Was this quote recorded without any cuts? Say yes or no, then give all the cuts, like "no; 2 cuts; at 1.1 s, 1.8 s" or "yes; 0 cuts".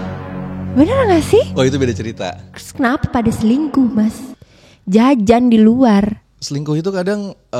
no; 1 cut; at 2.6 s